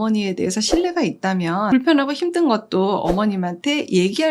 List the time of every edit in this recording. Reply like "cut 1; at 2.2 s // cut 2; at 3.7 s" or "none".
cut 1; at 1.7 s

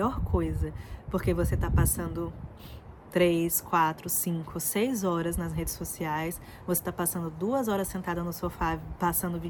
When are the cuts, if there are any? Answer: none

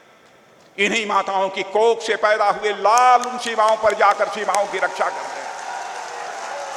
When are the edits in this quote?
none

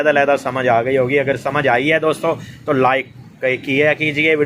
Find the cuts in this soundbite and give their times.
none

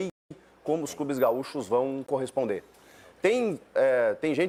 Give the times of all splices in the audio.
none

